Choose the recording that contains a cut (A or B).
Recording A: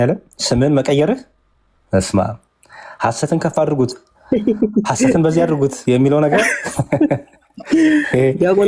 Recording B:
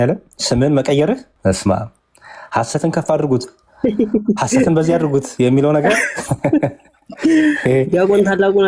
B